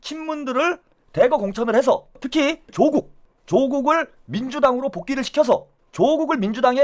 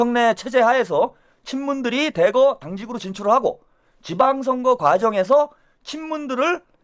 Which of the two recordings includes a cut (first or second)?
first